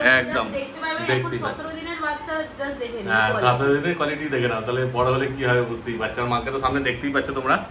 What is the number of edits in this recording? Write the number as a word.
zero